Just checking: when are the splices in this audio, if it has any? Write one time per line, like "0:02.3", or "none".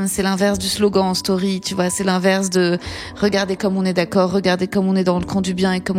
none

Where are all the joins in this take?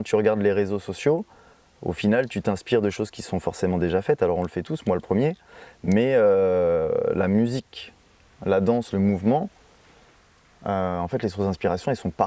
none

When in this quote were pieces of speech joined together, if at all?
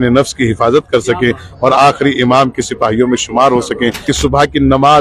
0:04.0

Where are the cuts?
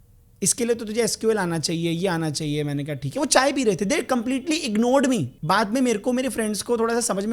0:05.3

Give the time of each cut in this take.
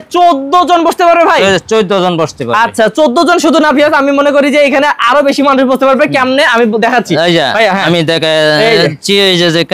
none

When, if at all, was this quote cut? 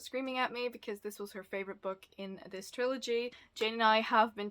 0:03.4

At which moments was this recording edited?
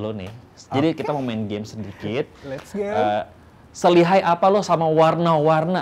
none

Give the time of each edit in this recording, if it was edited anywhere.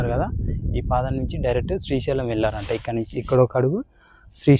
none

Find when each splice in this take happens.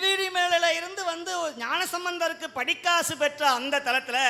none

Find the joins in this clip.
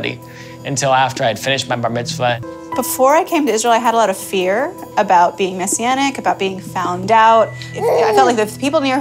0:02.4

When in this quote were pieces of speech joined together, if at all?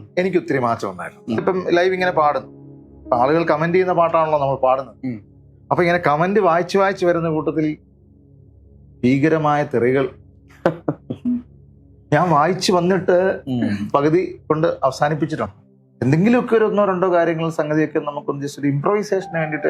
0:01.4
0:15.6

